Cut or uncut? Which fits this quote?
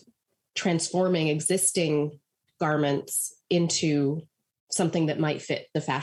uncut